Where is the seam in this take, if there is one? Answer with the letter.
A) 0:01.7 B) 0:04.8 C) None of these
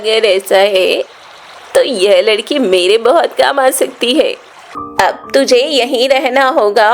B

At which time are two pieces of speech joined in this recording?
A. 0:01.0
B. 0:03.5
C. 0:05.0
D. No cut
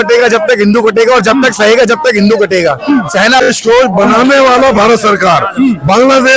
B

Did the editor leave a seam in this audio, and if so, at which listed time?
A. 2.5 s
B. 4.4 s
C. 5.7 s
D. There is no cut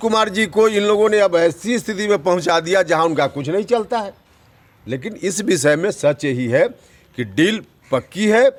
D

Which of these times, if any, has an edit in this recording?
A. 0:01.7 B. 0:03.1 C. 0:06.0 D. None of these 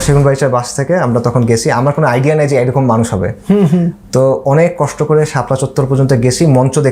D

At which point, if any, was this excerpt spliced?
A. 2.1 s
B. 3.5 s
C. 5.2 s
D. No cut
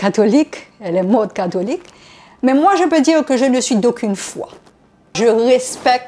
C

